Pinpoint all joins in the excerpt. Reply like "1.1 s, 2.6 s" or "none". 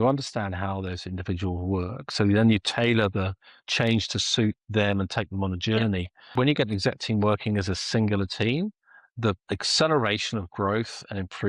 6.3 s, 9.4 s